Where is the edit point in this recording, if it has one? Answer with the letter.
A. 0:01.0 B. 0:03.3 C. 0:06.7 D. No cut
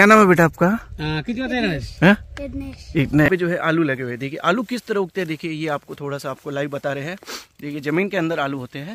B